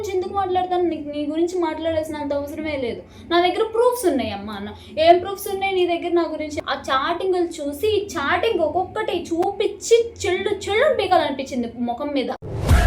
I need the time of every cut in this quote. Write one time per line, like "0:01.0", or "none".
0:06.6